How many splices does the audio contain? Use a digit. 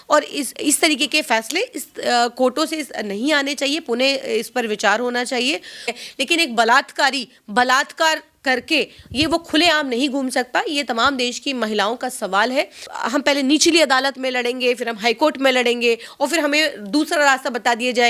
2